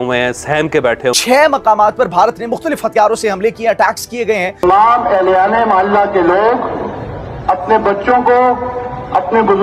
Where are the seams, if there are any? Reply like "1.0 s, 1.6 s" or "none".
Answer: 1.2 s, 4.6 s